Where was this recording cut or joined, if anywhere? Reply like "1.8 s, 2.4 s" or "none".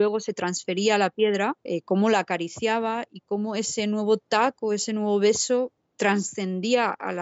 1.6 s, 5.8 s